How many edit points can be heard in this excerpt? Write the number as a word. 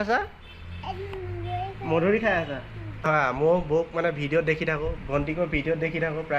one